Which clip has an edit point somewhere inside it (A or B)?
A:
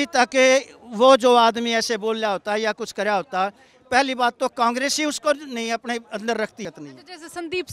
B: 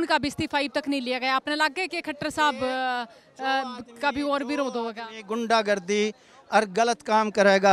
A